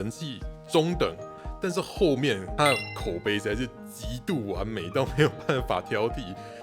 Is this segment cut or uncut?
cut